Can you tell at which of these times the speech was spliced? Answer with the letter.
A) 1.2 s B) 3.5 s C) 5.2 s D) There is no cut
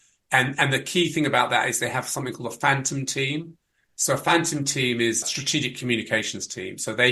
C